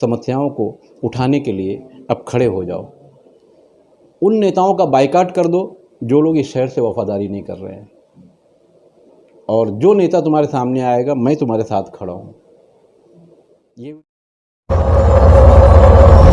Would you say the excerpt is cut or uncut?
cut